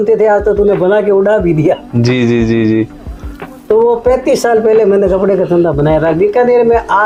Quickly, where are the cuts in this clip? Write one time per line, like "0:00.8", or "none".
none